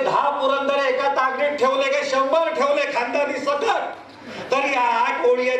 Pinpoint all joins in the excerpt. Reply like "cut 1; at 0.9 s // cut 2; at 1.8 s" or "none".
none

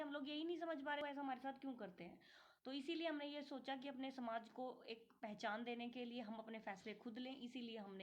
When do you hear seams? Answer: cut 1; at 1.0 s

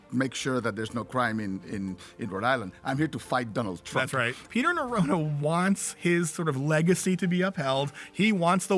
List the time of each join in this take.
cut 1; at 4.4 s

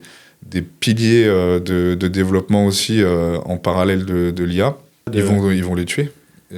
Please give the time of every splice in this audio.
cut 1; at 5.1 s

